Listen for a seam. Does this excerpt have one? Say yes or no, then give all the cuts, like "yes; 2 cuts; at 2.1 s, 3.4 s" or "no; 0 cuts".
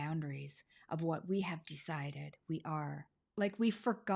yes; 1 cut; at 3.2 s